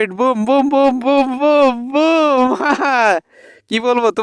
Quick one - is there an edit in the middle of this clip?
no; 0 cuts

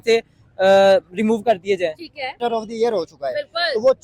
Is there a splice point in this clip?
yes; 1 cut; at 2.3 s

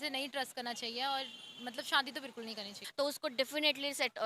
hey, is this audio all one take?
no; 1 cut; at 2.8 s

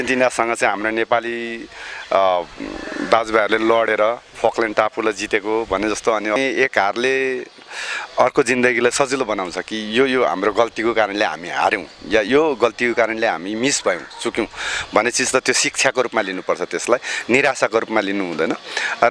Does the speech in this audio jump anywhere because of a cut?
yes; 1 cut; at 6.4 s

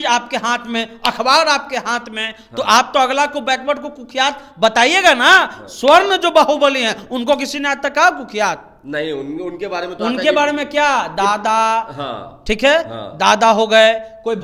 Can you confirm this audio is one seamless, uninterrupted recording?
yes; 0 cuts

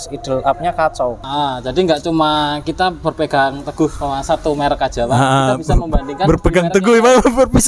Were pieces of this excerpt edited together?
yes; 1 cut; at 1.2 s

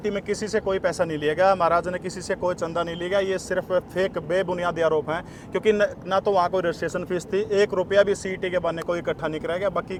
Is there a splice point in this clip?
no; 0 cuts

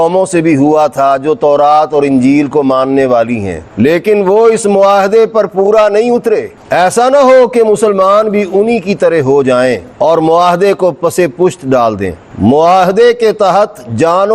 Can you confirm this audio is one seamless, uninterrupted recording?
no; 1 cut; at 12.2 s

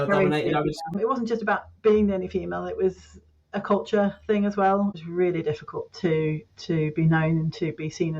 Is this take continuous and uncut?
no; 2 cuts; at 1.0 s, 5.0 s

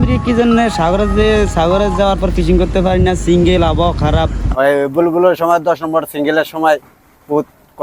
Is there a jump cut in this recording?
yes; 1 cut; at 4.4 s

